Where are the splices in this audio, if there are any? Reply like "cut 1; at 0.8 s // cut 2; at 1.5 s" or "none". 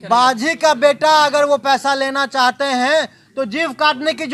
none